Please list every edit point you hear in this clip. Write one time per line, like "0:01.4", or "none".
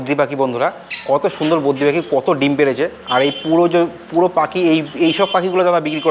none